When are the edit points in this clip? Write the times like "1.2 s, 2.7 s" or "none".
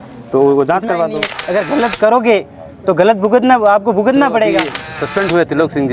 1.2 s, 4.8 s